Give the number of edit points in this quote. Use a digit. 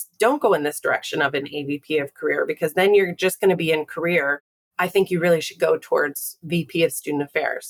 0